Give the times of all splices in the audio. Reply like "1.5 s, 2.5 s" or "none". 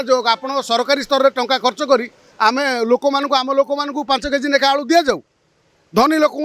none

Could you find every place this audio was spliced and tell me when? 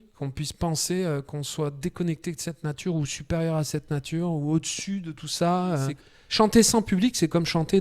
6.2 s

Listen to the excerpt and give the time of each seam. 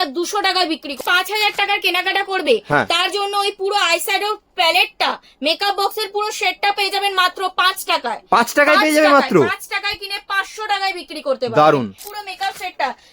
1.0 s, 12.0 s

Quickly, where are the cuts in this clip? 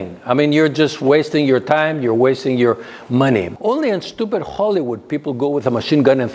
3.5 s

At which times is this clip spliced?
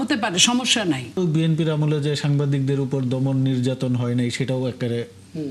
1.2 s

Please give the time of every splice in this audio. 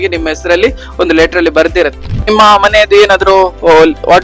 2.3 s

